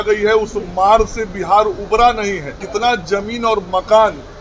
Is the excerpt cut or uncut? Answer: cut